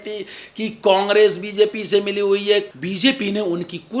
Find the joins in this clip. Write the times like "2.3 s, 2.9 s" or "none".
2.7 s